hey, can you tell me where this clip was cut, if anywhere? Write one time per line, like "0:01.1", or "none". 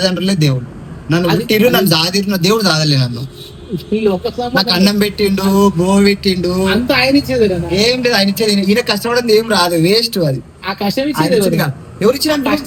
none